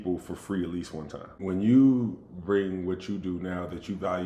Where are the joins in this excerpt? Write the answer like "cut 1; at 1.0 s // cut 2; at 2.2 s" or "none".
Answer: cut 1; at 1.4 s